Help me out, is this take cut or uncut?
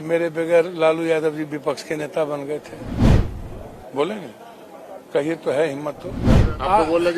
cut